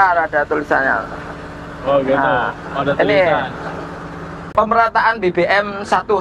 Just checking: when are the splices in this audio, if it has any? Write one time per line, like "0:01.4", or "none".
0:04.4

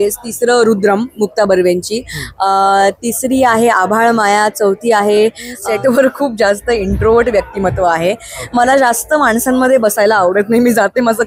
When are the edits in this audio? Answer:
0:05.5

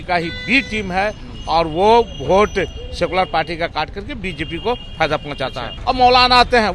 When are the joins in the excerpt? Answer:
0:05.7

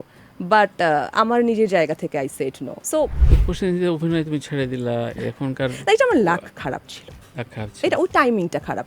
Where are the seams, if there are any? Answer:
0:03.2

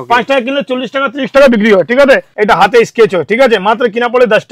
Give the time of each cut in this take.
0:02.3

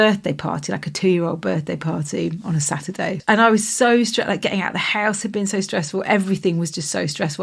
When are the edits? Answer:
0:03.2

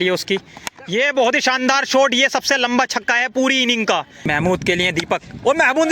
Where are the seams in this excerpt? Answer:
0:04.1

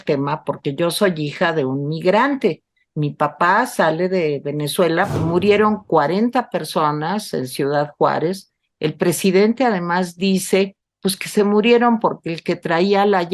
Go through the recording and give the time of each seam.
0:05.2

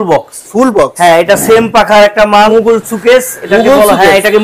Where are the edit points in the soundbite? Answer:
0:02.5

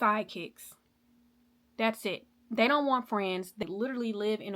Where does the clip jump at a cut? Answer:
0:03.6

